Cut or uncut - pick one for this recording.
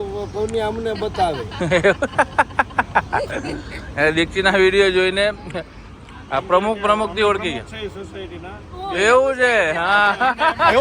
uncut